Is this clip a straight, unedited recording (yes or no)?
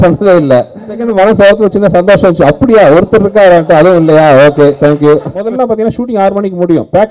no